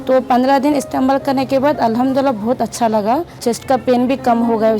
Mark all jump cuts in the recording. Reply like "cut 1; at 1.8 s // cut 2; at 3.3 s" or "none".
cut 1; at 3.4 s